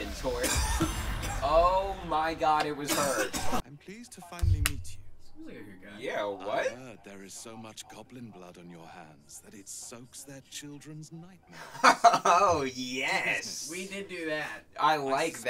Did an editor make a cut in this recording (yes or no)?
yes